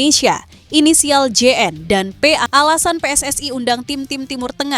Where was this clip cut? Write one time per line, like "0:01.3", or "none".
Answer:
0:02.4